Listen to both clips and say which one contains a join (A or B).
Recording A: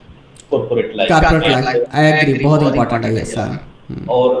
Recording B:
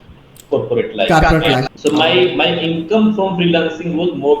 B